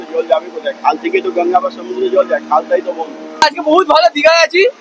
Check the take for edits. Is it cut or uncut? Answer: cut